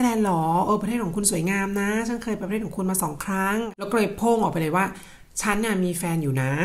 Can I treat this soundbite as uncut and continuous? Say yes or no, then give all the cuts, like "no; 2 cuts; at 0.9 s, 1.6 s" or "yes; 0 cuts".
no; 1 cut; at 3.7 s